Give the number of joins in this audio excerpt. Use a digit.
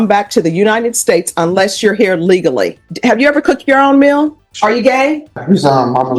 3